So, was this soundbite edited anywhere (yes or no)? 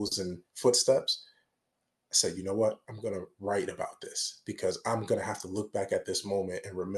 no